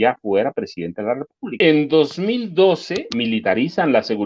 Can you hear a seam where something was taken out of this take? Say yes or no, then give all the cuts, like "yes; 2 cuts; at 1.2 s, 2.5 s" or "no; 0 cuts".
yes; 2 cuts; at 1.6 s, 3.0 s